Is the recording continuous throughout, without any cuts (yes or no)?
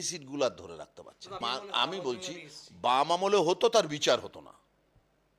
no